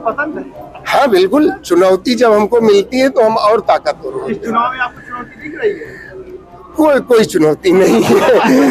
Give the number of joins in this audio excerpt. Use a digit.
0